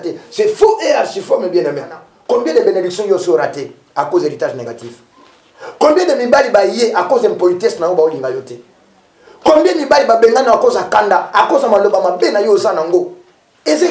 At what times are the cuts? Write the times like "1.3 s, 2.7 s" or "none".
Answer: 2.1 s

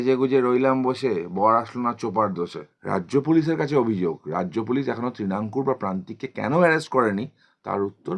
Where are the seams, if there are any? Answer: 2.7 s

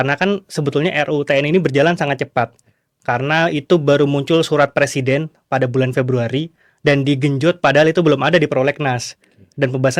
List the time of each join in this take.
none

